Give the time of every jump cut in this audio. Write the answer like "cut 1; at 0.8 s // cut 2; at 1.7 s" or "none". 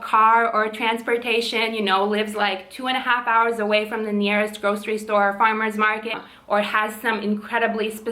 cut 1; at 6.1 s

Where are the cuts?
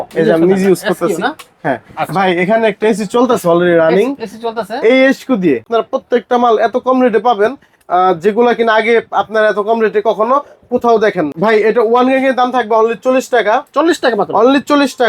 cut 1; at 5.7 s // cut 2; at 11.3 s

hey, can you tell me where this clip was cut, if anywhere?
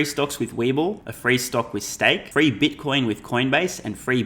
cut 1; at 1.1 s // cut 2; at 2.2 s

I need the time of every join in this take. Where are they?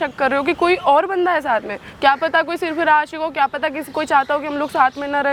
none

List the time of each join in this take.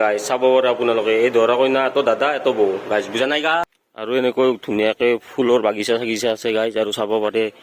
cut 1; at 3.6 s

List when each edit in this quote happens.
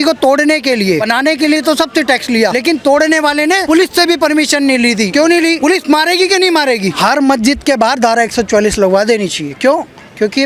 cut 1; at 1.0 s // cut 2; at 2.6 s // cut 3; at 3.6 s // cut 4; at 5.4 s // cut 5; at 6.9 s

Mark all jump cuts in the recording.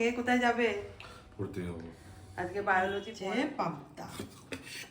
cut 1; at 3.1 s

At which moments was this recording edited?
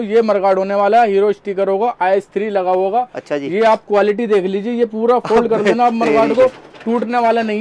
none

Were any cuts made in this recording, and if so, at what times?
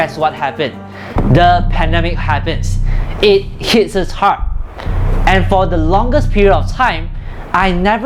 none

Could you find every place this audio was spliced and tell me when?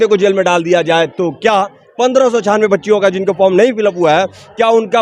none

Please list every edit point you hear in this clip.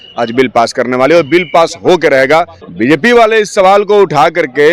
cut 1; at 2.6 s

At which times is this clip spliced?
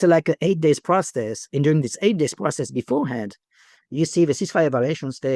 none

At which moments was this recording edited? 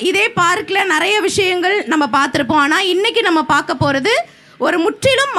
none

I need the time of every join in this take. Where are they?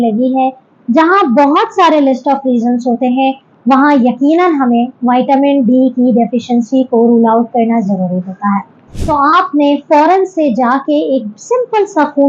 cut 1; at 8.9 s

